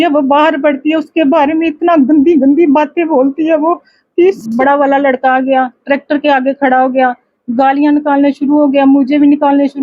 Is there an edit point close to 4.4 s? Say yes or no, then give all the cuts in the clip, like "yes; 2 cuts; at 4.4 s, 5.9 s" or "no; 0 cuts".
yes; 1 cut; at 4.4 s